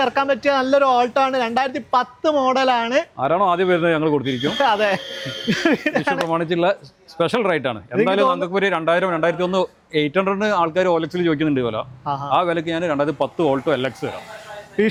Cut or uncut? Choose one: uncut